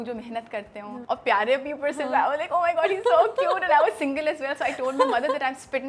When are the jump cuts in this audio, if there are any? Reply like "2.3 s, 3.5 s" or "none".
1.0 s